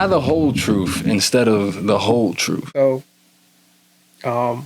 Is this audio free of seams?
no; 1 cut; at 2.7 s

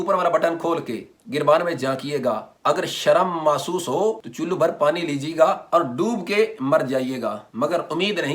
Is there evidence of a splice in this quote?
yes; 3 cuts; at 4.3 s, 5.6 s, 7.4 s

